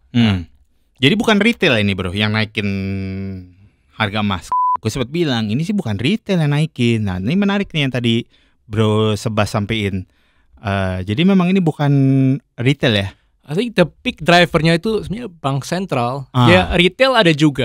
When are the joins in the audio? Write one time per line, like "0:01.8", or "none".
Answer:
0:04.5